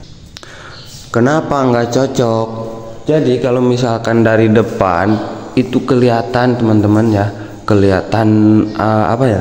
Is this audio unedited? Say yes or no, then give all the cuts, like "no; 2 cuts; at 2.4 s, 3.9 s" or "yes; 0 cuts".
yes; 0 cuts